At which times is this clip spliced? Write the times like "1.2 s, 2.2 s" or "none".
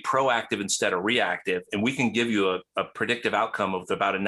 none

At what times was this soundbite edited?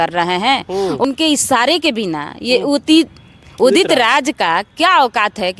1.0 s

